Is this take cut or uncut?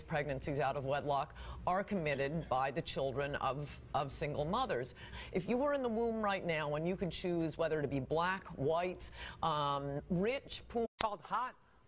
uncut